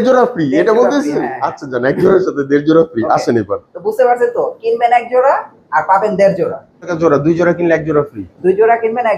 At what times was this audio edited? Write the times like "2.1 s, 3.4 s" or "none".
6.9 s